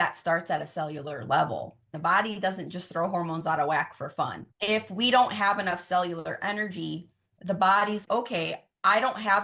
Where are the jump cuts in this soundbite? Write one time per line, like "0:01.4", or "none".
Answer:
0:01.9